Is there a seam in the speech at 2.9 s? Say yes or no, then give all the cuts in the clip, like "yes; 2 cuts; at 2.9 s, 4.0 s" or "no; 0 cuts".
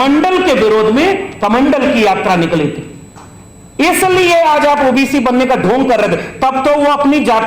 no; 0 cuts